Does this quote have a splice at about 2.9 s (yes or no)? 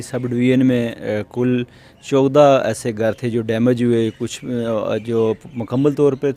no